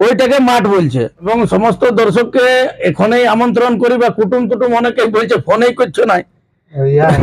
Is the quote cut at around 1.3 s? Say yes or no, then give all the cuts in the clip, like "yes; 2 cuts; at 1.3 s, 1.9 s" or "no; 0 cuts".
yes; 1 cut; at 1.3 s